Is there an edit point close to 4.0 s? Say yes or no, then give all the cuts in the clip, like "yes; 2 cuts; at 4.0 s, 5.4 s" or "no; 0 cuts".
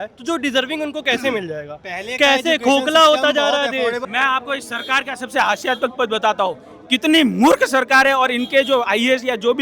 yes; 1 cut; at 4.0 s